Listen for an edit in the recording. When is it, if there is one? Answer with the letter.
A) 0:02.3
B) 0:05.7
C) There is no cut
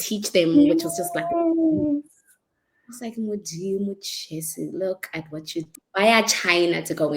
B